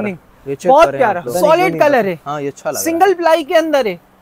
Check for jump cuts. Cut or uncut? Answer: cut